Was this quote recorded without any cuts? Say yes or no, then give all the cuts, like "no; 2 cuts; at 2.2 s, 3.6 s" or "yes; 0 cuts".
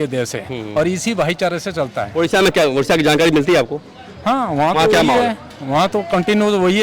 yes; 0 cuts